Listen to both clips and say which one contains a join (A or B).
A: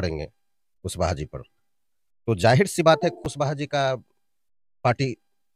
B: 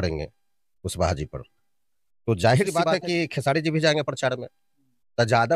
B